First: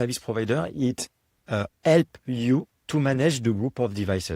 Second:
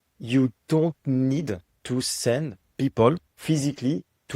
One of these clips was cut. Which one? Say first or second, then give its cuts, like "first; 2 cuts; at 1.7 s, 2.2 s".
second; 3 cuts; at 1.7 s, 2.6 s, 3.3 s